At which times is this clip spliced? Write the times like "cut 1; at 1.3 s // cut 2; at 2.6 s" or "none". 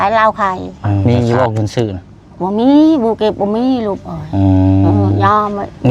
cut 1; at 1.0 s